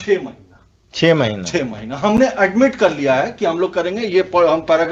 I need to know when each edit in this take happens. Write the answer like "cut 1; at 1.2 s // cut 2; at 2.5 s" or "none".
none